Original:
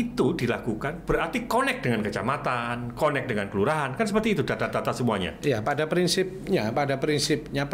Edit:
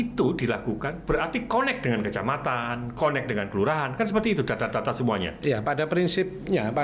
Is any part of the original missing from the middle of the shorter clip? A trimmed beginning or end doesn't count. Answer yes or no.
no